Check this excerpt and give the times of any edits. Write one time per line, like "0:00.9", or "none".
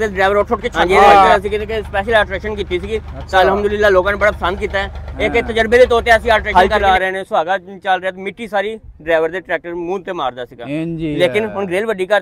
0:01.4
0:06.5